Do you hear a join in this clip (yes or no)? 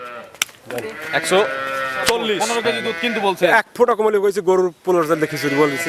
yes